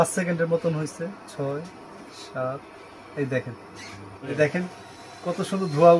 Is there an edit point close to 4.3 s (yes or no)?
yes